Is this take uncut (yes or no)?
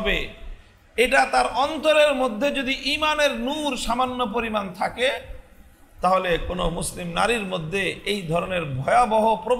yes